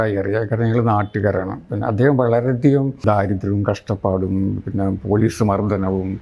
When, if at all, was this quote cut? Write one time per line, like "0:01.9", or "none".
0:01.6
0:03.0